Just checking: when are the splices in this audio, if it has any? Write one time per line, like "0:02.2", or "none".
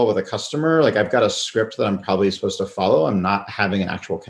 none